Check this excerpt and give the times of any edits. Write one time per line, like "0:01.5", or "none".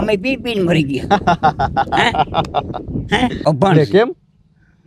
0:03.4